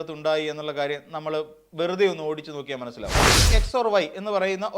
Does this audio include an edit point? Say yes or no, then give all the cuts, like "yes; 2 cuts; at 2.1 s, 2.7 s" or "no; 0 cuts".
yes; 1 cut; at 3.4 s